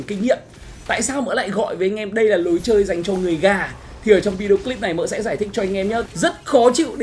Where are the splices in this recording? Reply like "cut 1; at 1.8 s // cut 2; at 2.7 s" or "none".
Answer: cut 1; at 6.1 s